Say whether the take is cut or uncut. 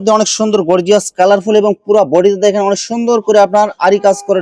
uncut